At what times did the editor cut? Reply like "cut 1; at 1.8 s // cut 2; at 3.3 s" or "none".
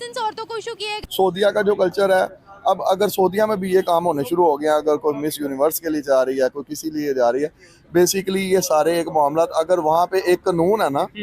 cut 1; at 1.0 s